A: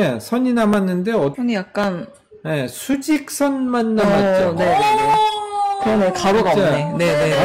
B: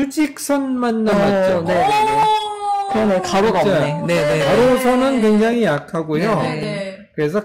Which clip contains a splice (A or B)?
A